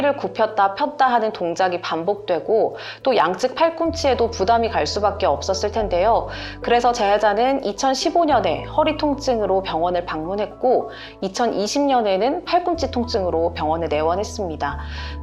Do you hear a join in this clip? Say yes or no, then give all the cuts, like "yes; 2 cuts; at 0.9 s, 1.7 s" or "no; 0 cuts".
no; 0 cuts